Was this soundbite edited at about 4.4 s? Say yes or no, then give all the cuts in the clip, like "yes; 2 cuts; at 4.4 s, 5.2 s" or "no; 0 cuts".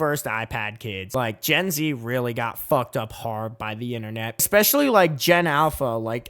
yes; 1 cut; at 4.4 s